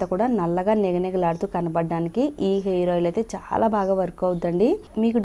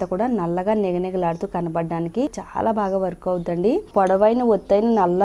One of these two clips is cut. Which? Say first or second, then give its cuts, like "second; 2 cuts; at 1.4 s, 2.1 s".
second; 2 cuts; at 2.3 s, 3.9 s